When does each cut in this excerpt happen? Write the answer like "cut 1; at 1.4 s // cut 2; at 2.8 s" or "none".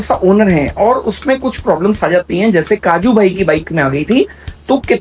none